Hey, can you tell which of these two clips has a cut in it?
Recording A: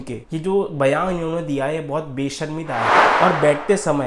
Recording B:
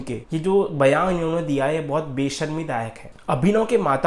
A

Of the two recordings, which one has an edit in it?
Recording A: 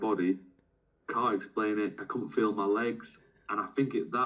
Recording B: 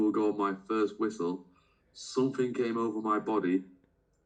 A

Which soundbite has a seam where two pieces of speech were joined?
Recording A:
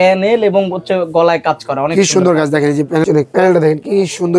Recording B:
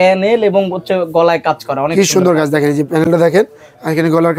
A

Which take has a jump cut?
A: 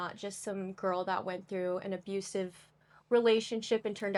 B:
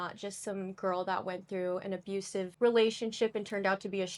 B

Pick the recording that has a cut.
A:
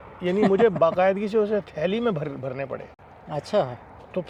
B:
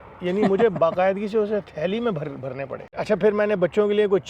B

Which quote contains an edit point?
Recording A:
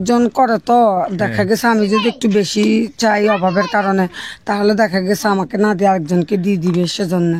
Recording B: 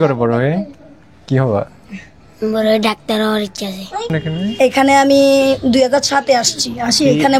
B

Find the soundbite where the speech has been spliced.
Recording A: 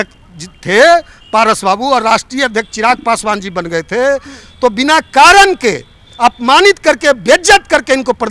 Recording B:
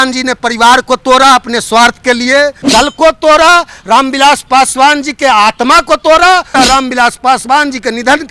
B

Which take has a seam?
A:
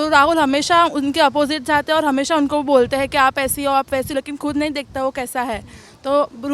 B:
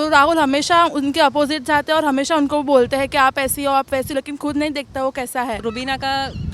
B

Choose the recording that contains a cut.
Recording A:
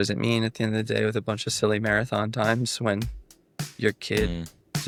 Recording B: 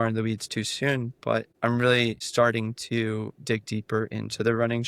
B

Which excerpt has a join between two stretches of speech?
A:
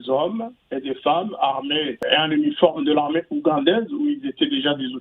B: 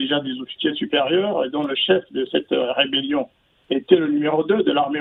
A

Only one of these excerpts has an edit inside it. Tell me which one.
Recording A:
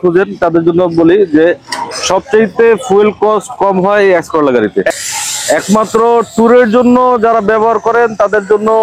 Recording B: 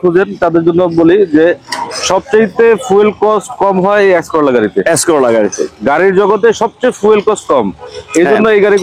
A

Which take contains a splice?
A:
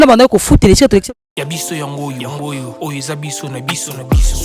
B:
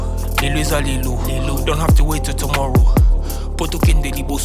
A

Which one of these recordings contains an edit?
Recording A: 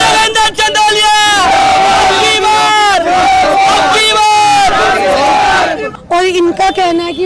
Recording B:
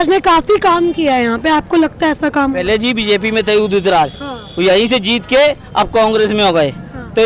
A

